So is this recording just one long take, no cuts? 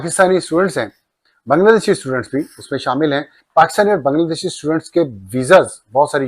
no; 1 cut; at 3.3 s

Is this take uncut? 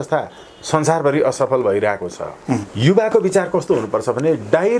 no; 1 cut; at 2.7 s

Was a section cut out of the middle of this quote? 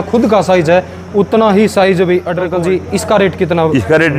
yes; 1 cut; at 2.4 s

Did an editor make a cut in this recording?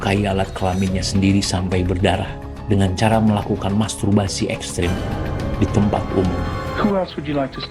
yes; 1 cut; at 6.6 s

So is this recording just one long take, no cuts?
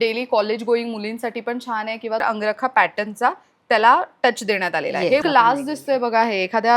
no; 2 cuts; at 2.2 s, 5.2 s

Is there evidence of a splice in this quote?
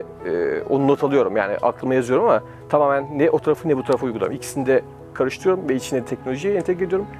no; 0 cuts

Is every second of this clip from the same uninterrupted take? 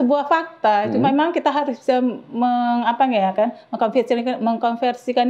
yes; 0 cuts

